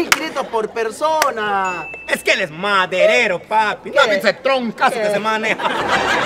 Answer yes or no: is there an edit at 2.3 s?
no